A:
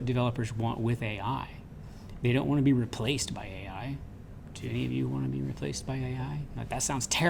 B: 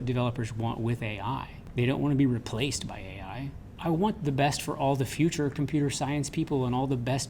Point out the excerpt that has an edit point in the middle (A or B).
B